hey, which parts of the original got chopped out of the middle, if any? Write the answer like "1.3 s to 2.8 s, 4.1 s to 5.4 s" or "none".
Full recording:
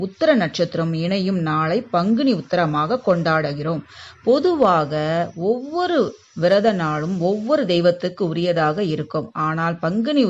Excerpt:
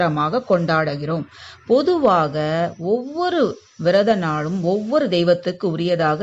none